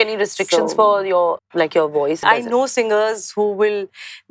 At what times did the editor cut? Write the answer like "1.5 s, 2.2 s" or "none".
1.4 s, 2.2 s